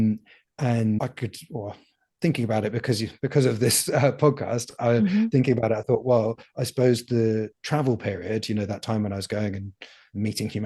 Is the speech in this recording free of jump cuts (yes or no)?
yes